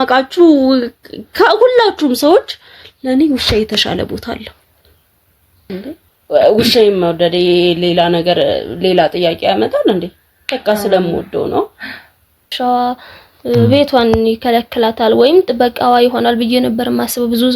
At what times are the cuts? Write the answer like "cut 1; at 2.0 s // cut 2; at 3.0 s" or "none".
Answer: cut 1; at 5.7 s // cut 2; at 12.5 s